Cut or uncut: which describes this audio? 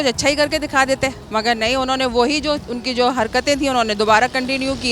cut